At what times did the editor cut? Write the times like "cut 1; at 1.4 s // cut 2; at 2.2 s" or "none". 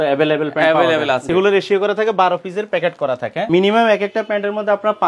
cut 1; at 1.3 s // cut 2; at 3.4 s